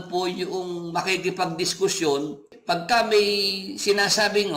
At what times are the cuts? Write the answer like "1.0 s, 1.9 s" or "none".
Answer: 2.5 s